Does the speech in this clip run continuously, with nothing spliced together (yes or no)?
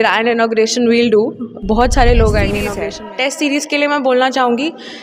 no